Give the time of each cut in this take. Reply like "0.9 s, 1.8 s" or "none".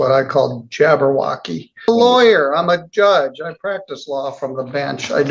1.9 s